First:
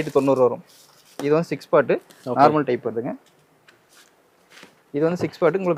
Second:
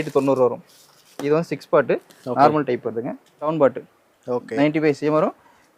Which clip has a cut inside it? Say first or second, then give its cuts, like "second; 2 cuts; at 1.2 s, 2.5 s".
second; 1 cut; at 3.5 s